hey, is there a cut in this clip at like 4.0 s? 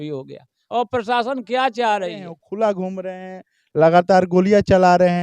no; 1 cut; at 2.4 s

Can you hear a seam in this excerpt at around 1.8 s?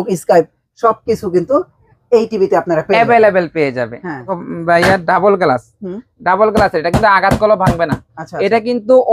no; 1 cut; at 4.4 s

